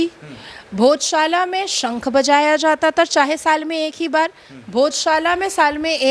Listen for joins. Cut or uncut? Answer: uncut